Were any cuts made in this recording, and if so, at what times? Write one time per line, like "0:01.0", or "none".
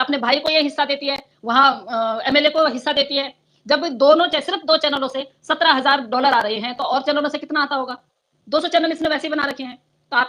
none